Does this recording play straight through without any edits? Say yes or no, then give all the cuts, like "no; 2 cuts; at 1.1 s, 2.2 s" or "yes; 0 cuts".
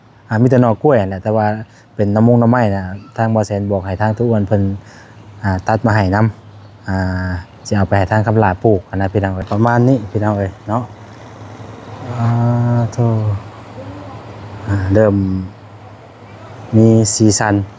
no; 1 cut; at 9.5 s